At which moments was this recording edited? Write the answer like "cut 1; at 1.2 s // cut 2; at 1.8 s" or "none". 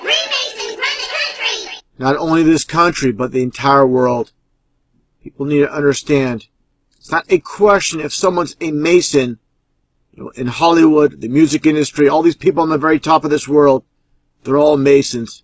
cut 1; at 8.8 s